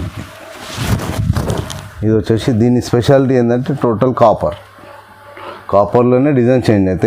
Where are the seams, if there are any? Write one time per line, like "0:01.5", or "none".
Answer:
none